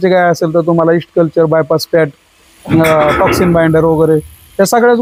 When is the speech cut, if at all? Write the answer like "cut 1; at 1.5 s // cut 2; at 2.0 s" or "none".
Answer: none